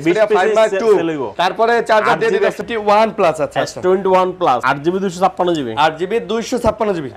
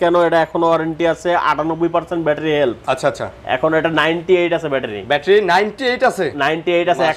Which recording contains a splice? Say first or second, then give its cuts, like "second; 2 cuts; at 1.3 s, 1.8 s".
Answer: first; 3 cuts; at 1.3 s, 2.6 s, 4.6 s